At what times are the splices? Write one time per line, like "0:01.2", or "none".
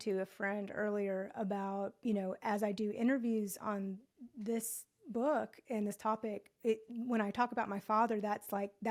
none

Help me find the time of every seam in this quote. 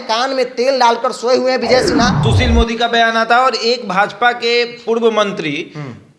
0:02.2

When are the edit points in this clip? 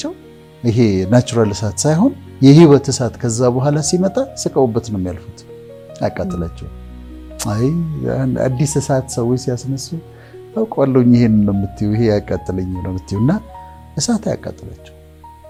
none

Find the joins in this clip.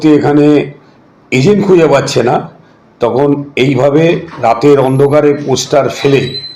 none

